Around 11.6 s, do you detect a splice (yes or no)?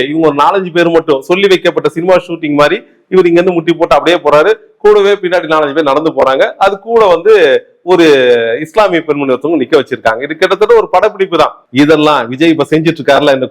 yes